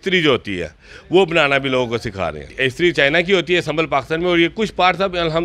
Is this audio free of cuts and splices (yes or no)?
no